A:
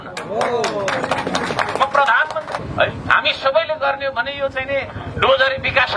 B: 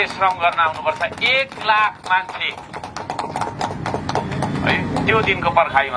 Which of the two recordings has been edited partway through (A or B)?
A